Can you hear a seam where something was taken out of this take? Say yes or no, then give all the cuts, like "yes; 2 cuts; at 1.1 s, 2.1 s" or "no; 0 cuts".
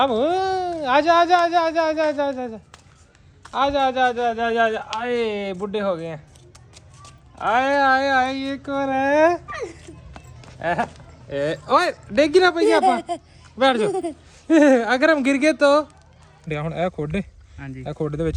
yes; 1 cut; at 16.5 s